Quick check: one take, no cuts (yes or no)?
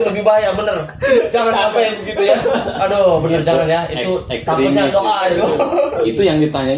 yes